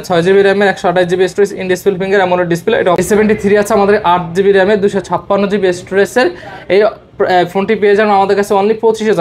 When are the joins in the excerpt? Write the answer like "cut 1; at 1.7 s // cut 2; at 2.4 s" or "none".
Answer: cut 1; at 3.0 s